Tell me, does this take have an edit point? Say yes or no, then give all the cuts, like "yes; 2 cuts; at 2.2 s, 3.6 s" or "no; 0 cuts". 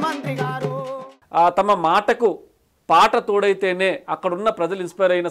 yes; 1 cut; at 1.1 s